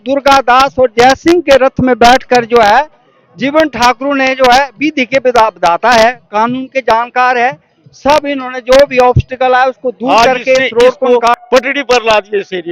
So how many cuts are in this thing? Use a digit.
1